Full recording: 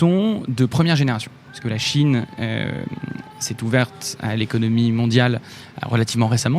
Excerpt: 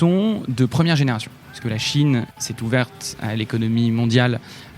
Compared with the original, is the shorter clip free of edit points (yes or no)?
no